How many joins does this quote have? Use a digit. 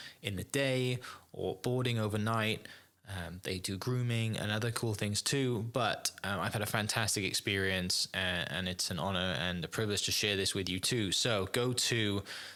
0